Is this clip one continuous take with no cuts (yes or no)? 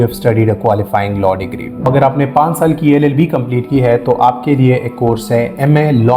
no